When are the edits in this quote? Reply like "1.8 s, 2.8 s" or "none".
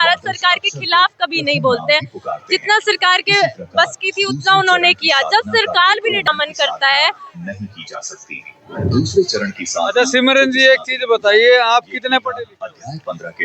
2.2 s, 6.2 s